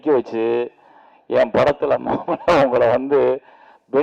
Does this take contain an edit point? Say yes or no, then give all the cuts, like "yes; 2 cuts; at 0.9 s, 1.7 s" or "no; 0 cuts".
no; 0 cuts